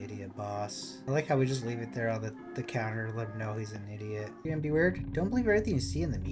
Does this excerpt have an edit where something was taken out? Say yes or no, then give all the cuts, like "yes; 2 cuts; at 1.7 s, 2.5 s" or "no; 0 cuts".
yes; 2 cuts; at 1.0 s, 4.5 s